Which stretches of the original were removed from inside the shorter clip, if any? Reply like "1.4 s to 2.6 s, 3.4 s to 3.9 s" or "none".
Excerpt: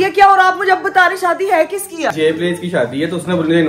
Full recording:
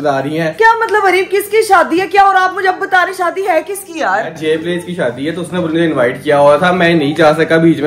4.1 s to 4.4 s